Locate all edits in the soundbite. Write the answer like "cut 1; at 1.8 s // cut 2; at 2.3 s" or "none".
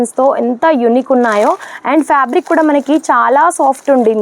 none